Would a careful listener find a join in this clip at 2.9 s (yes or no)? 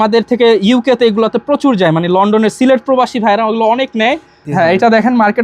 no